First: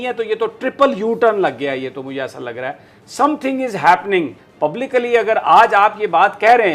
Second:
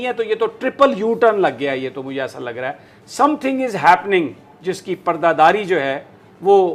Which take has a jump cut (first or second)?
first